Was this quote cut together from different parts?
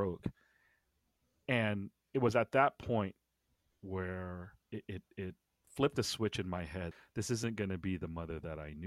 yes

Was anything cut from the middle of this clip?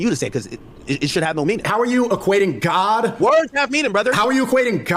yes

